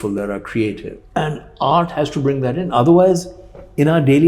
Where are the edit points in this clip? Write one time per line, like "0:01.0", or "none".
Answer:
0:00.9